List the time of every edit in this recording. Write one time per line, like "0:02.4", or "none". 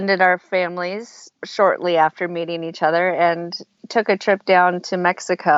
none

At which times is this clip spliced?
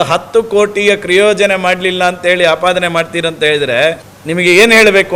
0:04.1

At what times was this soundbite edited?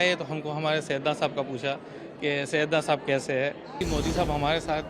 0:03.8

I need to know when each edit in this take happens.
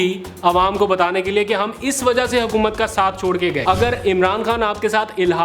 0:03.6

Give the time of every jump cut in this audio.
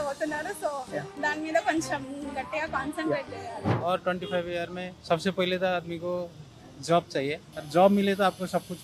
none

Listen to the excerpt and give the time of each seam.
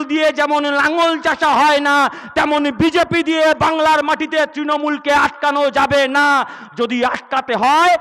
none

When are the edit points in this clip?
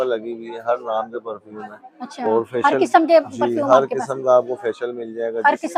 none

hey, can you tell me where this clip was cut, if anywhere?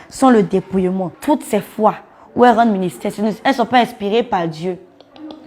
0:01.1

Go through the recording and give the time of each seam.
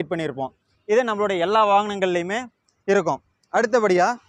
none

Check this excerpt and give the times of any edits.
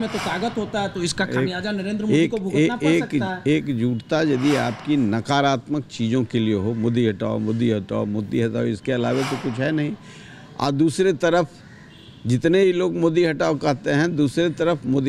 none

